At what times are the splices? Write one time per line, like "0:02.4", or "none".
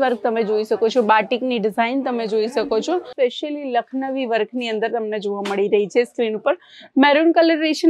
0:03.1